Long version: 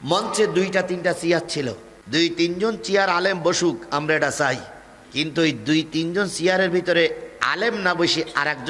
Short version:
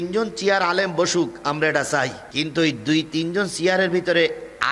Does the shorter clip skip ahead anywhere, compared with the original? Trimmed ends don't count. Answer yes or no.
yes